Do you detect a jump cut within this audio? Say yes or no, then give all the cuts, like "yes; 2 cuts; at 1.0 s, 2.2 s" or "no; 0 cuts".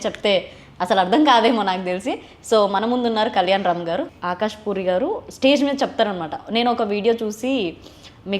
yes; 1 cut; at 4.2 s